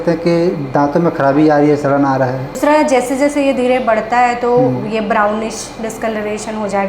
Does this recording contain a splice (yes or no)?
yes